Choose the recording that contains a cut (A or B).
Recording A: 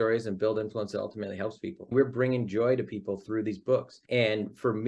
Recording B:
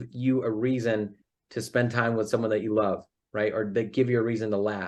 A